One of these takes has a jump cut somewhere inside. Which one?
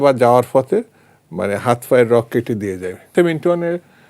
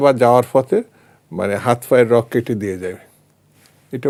first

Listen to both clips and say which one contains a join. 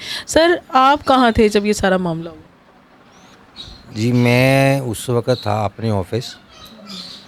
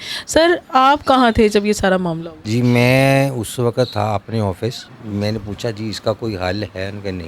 second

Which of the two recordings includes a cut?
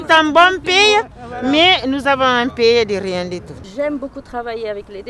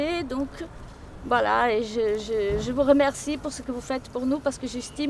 first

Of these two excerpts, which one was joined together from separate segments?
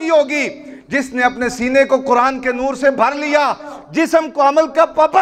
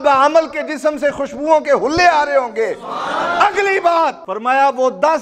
second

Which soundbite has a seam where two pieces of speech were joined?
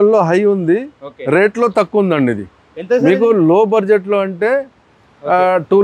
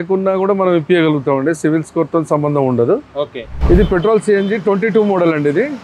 second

